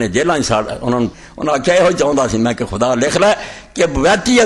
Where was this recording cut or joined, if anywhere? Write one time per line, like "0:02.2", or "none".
0:01.3